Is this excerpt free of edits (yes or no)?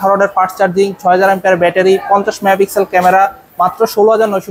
yes